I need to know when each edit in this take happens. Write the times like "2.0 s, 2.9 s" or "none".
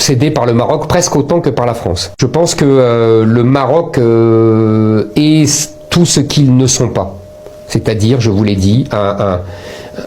2.1 s